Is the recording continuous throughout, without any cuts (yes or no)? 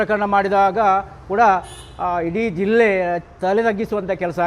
yes